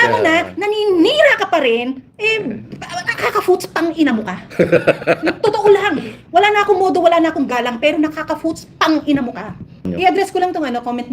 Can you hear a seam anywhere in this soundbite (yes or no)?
yes